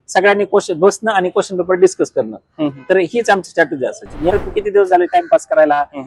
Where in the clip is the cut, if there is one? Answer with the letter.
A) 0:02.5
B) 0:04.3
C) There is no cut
B